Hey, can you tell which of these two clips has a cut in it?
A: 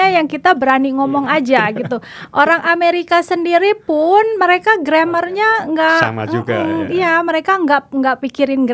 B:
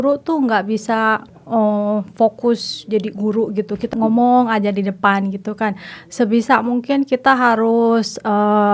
B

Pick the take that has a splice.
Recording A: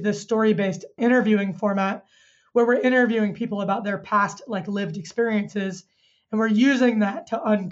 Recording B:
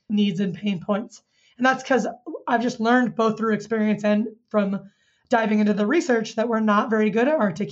A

